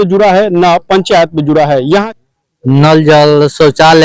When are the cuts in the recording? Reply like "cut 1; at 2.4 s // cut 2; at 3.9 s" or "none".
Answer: cut 1; at 2.1 s